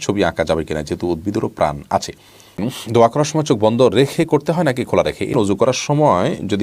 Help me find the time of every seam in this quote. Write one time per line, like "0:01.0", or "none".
0:02.6
0:05.3

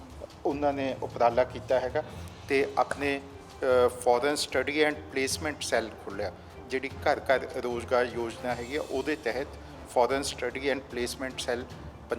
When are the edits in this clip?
none

